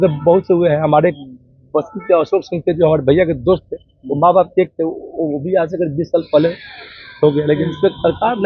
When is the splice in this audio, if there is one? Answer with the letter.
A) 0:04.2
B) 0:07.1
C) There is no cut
C